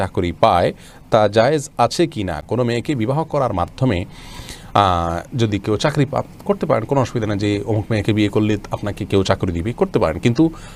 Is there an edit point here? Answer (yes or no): no